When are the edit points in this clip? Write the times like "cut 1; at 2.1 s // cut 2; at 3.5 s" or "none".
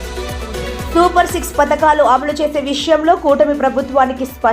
cut 1; at 0.9 s